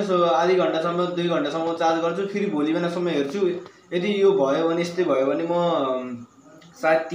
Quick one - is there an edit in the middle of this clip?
no; 0 cuts

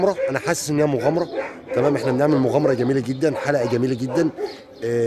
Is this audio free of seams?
yes; 0 cuts

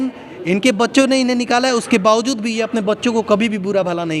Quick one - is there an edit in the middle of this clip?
no; 0 cuts

